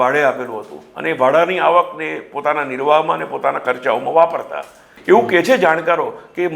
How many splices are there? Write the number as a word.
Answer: one